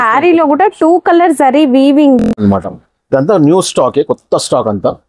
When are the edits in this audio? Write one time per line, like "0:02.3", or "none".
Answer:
0:02.3